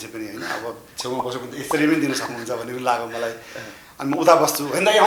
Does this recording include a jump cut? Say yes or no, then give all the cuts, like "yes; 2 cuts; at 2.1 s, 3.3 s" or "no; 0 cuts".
no; 0 cuts